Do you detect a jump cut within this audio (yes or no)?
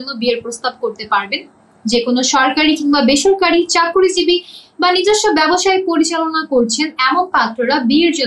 no